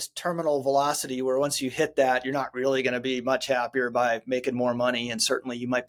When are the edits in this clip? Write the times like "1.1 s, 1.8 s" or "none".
none